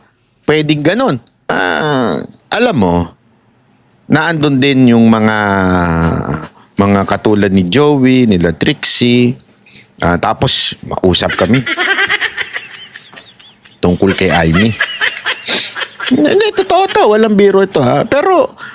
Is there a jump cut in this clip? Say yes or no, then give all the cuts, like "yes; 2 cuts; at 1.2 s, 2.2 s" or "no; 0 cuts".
yes; 1 cut; at 1.3 s